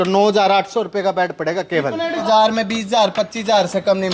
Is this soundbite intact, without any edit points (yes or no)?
no